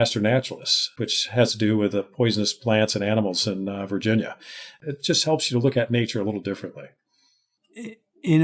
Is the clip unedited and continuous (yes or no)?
no